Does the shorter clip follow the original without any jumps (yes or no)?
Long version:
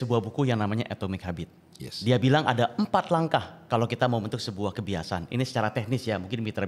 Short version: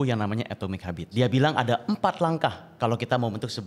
no